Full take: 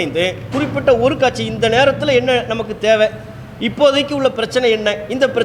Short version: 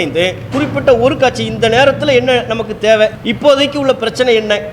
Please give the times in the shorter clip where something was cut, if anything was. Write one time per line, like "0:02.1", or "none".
0:03.2